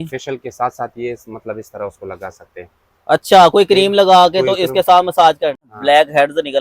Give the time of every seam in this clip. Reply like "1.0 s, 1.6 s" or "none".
5.6 s